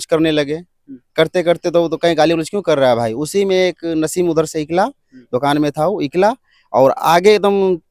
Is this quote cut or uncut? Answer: uncut